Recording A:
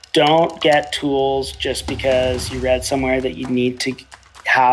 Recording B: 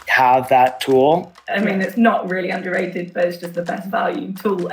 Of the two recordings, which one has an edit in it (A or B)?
B